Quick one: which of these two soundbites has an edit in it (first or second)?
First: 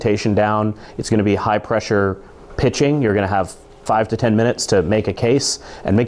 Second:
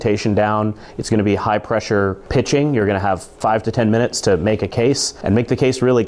second